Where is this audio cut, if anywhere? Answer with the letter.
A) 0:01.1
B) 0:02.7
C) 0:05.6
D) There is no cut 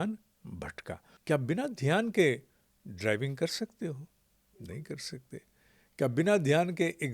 A